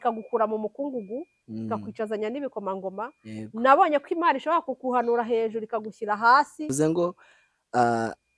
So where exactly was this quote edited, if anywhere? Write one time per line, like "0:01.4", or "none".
0:06.7